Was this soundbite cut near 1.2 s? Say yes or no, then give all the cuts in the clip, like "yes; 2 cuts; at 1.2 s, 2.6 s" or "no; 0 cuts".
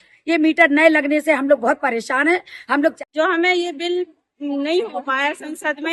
no; 1 cut; at 3.0 s